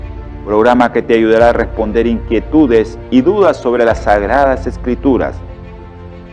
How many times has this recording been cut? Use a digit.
0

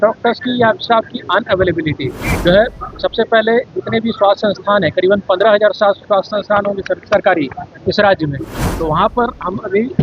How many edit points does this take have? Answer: 1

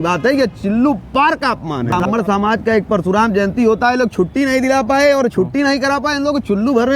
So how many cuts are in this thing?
1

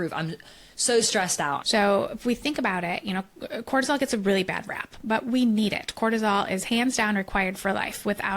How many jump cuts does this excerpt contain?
1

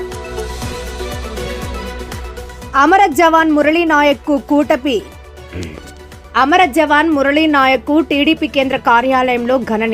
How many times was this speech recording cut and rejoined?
2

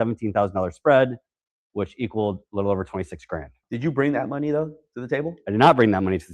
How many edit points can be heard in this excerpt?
1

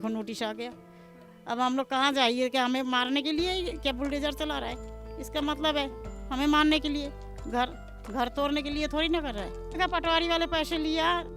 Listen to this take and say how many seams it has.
0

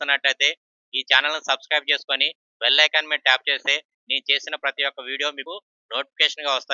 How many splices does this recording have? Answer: 1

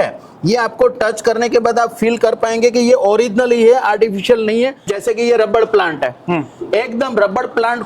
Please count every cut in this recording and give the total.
1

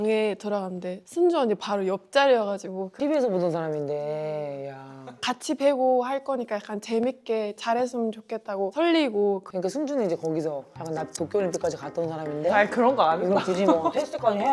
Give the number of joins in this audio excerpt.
2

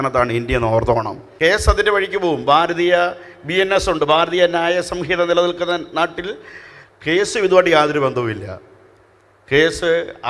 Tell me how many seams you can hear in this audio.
1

